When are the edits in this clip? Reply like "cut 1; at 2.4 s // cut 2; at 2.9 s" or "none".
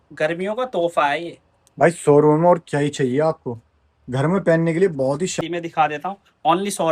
cut 1; at 5.4 s